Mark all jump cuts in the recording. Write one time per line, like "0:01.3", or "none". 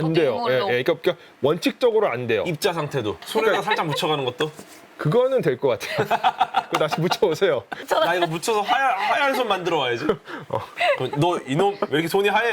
0:07.8
0:10.7